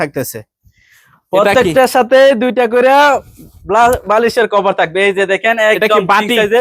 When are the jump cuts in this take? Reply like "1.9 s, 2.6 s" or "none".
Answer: none